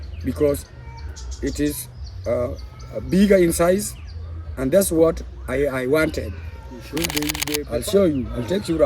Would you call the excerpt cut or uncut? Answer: cut